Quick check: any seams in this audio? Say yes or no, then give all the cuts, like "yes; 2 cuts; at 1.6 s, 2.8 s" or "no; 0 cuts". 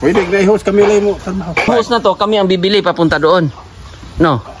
yes; 1 cut; at 1.7 s